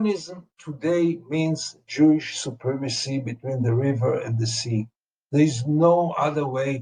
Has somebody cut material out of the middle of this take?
no; 0 cuts

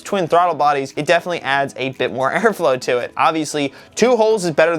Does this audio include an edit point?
yes; 1 cut; at 0.9 s

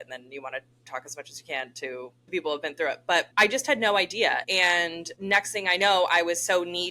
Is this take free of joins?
no; 4 cuts; at 0.9 s, 2.3 s, 3.3 s, 4.6 s

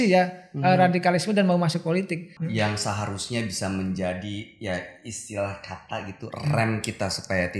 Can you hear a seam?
yes; 1 cut; at 2.3 s

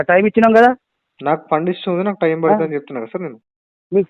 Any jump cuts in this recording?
no; 0 cuts

